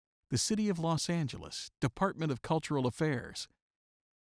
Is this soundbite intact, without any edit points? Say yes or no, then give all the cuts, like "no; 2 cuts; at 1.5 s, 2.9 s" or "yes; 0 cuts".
yes; 0 cuts